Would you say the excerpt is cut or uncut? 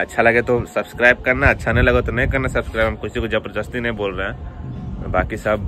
uncut